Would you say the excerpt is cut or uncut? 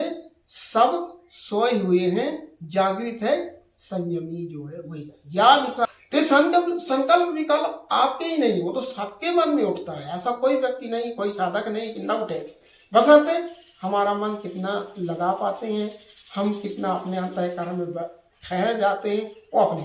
cut